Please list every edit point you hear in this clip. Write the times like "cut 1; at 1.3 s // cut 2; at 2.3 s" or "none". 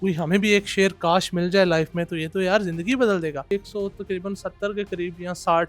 cut 1; at 3.5 s